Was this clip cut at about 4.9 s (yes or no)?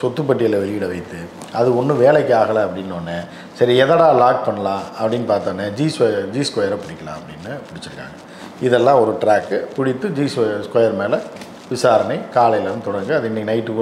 no